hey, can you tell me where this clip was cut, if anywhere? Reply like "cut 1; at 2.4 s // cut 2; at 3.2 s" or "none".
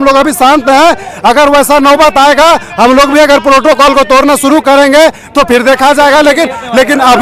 none